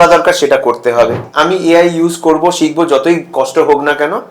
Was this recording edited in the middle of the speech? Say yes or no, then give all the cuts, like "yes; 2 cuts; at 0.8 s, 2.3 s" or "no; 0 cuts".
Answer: yes; 1 cut; at 1.2 s